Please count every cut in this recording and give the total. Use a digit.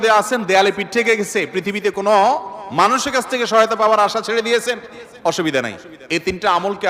0